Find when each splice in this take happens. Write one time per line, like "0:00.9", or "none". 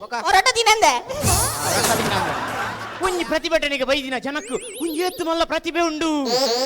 0:02.8